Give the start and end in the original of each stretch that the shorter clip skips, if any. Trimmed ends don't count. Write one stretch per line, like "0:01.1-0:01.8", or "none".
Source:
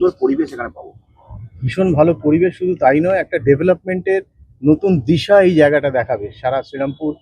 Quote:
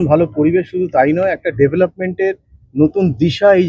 none

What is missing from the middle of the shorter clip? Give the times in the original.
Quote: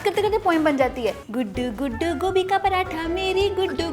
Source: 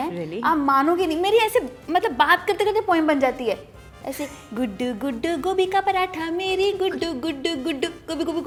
0:03.7-0:04.5

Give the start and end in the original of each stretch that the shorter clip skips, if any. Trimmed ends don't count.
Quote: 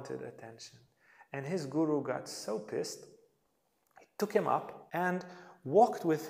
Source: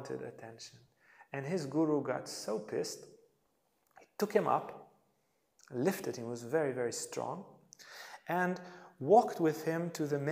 0:04.7-0:08.1

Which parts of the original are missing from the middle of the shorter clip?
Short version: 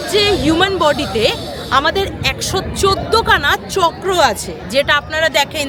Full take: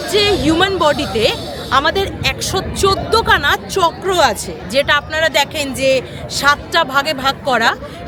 none

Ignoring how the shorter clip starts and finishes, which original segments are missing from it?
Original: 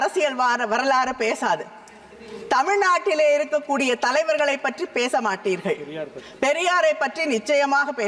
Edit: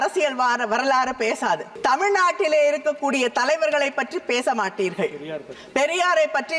0:01.7-0:02.4

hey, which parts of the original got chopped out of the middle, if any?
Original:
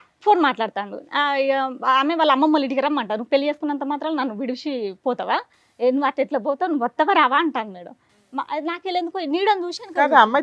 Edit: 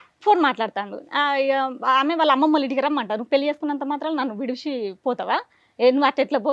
none

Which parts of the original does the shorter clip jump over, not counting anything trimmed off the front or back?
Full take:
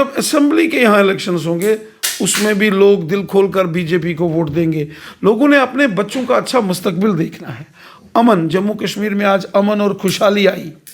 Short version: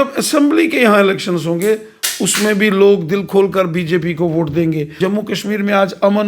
0:05.0-0:08.5

